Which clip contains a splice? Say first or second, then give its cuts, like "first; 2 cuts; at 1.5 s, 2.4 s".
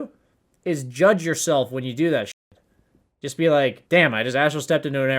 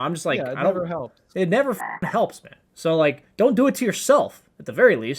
first; 1 cut; at 3.8 s